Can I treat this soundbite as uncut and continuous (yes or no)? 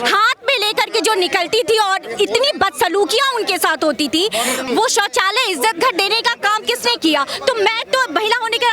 no